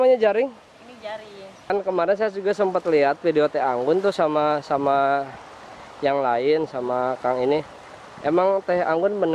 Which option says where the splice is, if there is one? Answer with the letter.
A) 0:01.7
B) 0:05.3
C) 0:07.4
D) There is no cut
A